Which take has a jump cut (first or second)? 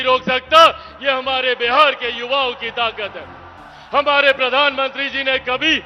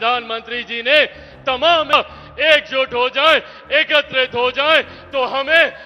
second